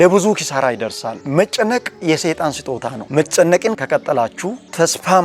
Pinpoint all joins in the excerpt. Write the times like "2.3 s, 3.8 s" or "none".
1.2 s, 3.0 s, 3.8 s